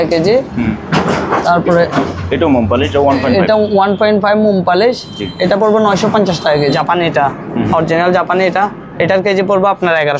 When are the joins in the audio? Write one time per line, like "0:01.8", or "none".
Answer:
0:06.8